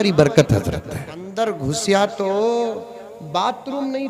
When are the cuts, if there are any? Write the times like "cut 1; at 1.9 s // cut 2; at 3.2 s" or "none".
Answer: cut 1; at 1.3 s